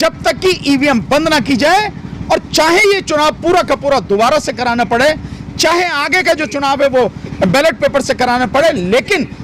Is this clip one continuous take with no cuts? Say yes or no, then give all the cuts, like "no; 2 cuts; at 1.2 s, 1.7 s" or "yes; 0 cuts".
yes; 0 cuts